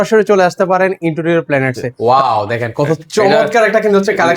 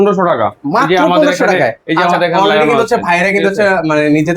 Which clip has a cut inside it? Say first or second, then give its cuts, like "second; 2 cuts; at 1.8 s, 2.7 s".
first; 1 cut; at 1.8 s